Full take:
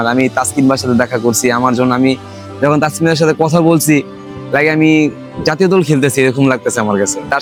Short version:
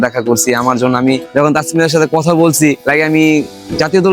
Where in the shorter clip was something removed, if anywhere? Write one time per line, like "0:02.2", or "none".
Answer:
0:01.2
0:02.8

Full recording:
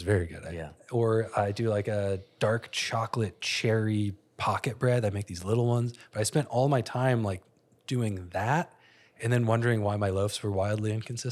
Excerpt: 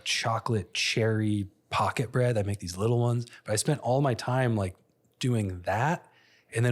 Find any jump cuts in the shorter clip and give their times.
none

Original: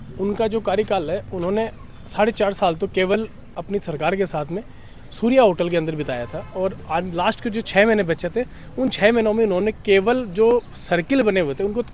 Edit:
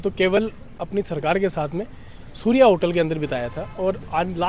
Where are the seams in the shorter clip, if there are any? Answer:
none

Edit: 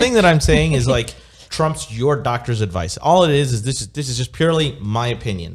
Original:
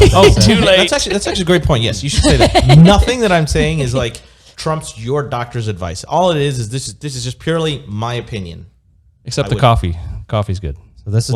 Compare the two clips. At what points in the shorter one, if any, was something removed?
none

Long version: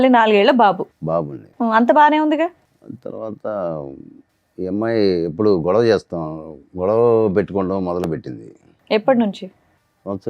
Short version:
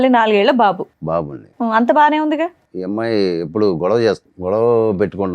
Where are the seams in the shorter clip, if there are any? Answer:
0:02.7
0:04.3

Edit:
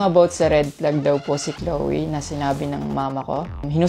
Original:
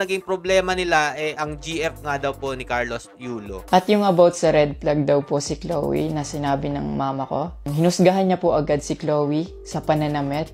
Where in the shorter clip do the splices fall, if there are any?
none

